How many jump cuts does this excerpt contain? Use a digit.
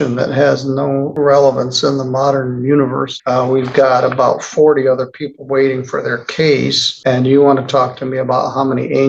3